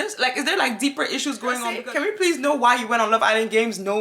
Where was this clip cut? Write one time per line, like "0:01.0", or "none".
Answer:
0:01.8

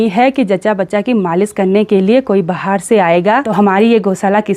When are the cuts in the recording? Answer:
0:03.5

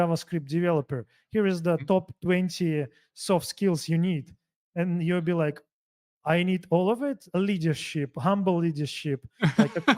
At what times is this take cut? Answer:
none

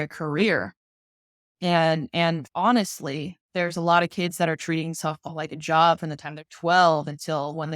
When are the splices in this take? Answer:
0:02.4

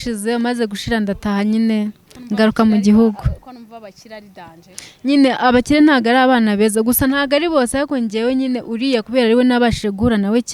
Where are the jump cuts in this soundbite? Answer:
none

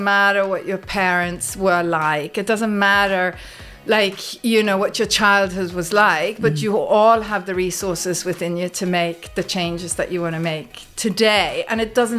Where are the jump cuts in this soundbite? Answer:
none

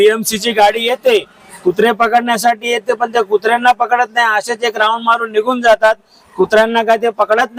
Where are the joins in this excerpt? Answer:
none

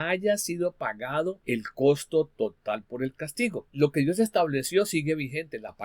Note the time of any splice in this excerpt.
0:01.4
0:03.6

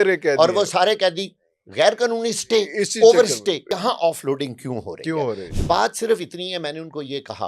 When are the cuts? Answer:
0:03.6
0:05.5

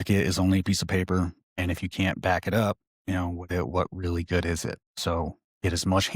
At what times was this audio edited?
0:01.5
0:02.9

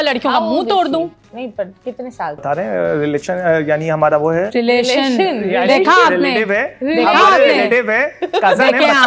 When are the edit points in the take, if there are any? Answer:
0:02.4

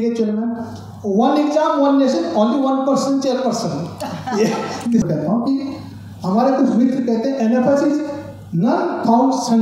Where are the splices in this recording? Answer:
0:05.0

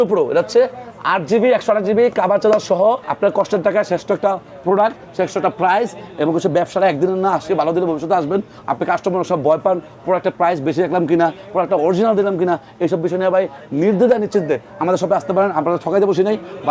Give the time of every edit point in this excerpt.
0:03.1

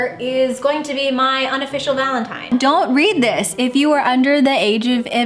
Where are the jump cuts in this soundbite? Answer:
0:02.5

